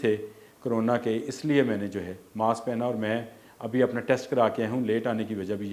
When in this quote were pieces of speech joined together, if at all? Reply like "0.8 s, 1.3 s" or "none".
none

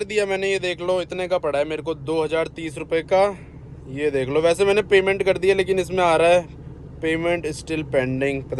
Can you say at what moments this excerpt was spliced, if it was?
none

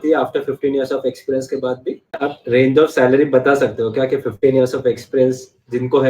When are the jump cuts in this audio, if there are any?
2.3 s

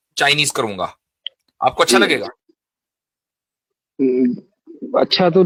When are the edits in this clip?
none

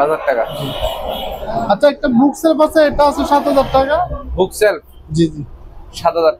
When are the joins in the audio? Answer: none

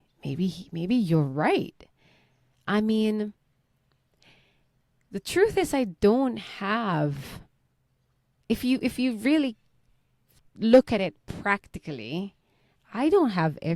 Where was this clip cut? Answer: none

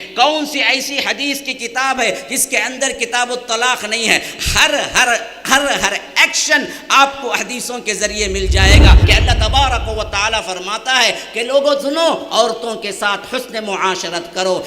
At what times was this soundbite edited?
9.0 s

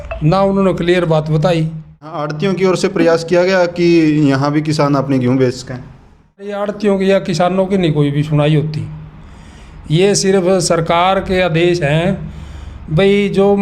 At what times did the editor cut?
2.4 s, 6.6 s

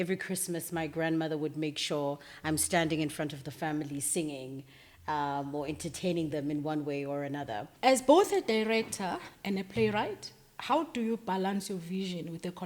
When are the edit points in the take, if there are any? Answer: 7.7 s

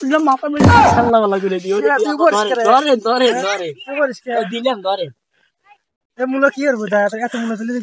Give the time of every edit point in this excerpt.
none

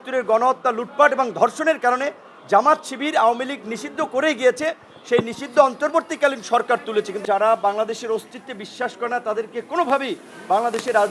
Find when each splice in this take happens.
7.2 s

